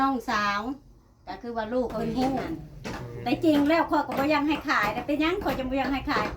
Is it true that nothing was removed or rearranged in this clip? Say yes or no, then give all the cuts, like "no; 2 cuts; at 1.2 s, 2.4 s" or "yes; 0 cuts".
no; 1 cut; at 2.6 s